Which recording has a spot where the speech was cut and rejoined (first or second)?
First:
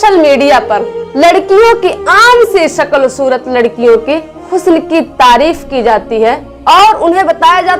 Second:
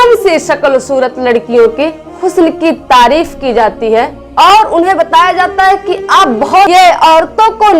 second